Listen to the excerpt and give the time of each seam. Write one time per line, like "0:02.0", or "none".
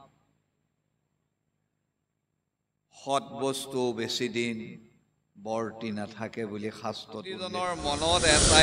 0:07.4